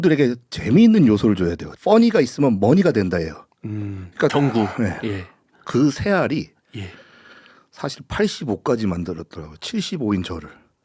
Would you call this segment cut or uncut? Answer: cut